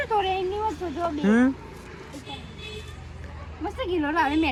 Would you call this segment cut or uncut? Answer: uncut